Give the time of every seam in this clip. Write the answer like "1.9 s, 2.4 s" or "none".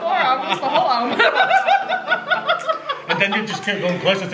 none